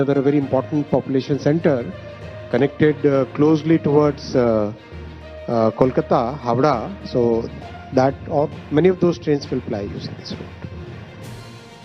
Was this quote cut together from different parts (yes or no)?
yes